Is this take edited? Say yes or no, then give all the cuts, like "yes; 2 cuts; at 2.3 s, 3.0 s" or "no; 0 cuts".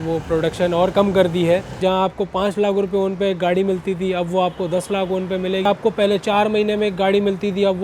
yes; 2 cuts; at 1.8 s, 5.6 s